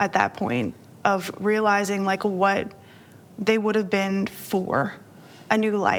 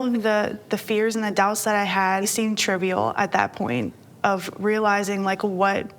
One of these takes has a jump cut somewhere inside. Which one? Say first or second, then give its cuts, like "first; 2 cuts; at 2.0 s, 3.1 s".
second; 1 cut; at 2.3 s